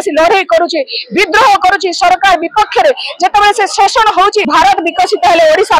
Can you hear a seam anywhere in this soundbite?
yes; 1 cut; at 4.5 s

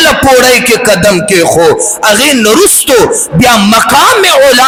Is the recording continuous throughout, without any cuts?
yes; 0 cuts

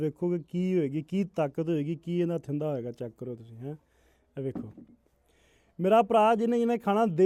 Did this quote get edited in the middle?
no; 0 cuts

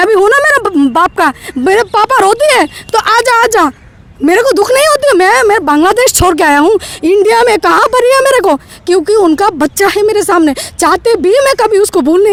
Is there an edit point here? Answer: no; 0 cuts

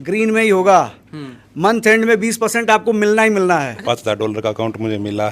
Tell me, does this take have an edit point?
yes; 1 cut; at 3.7 s

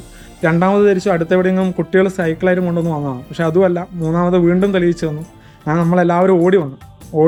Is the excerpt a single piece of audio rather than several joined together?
yes; 0 cuts

